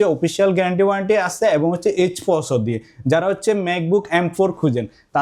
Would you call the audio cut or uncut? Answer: uncut